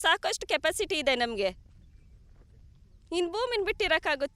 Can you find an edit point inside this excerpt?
no; 0 cuts

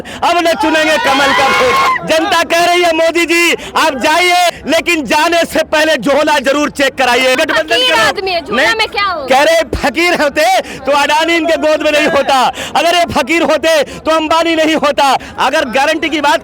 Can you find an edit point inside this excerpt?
yes; 4 cuts; at 1.9 s, 4.5 s, 7.4 s, 15.3 s

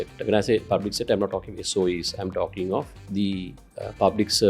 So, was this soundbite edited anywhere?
yes; 1 cut; at 3.0 s

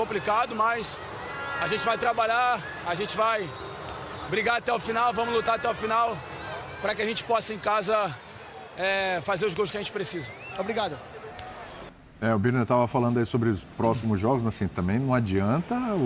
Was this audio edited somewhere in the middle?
no; 0 cuts

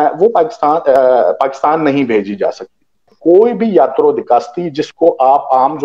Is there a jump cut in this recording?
yes; 1 cut; at 3.1 s

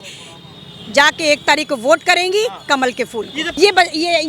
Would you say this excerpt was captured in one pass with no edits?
no; 1 cut; at 3.4 s

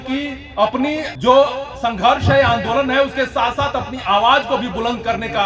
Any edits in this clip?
yes; 1 cut; at 1.1 s

